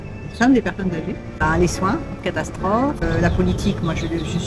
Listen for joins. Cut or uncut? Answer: cut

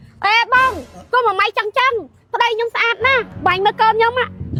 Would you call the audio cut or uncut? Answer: uncut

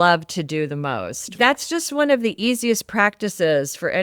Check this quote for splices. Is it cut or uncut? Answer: cut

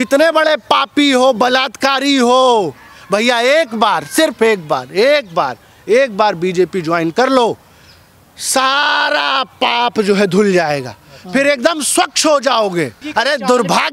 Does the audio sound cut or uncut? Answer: cut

